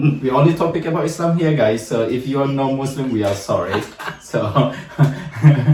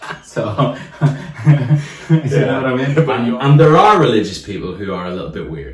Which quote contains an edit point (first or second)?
second